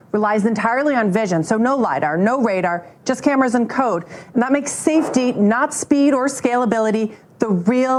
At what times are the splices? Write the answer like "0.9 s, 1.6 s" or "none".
none